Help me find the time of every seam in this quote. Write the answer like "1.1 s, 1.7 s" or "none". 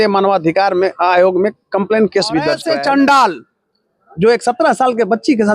2.6 s